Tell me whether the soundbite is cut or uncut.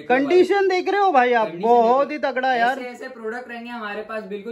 uncut